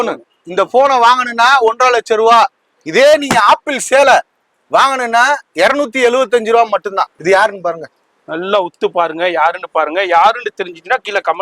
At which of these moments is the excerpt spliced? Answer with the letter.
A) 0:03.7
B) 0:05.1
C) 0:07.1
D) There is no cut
C